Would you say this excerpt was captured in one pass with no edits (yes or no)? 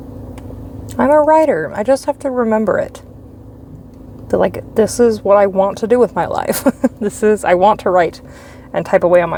yes